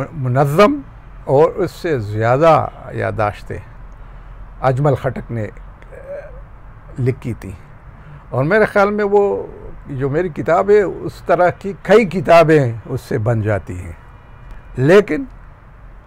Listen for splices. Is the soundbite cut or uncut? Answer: uncut